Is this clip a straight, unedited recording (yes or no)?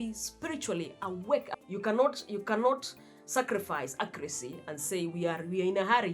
no